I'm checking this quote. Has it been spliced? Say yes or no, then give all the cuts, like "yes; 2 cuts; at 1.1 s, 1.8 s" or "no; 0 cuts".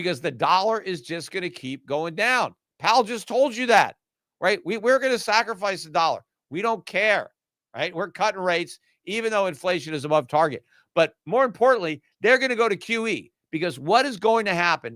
no; 0 cuts